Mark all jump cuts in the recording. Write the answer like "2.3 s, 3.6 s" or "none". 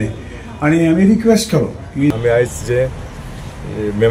2.1 s